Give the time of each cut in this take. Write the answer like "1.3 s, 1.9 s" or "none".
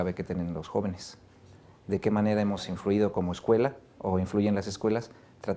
none